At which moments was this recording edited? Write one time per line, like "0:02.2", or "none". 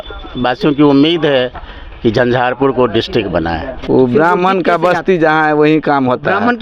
0:03.7